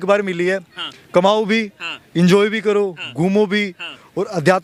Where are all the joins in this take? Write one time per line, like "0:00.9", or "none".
none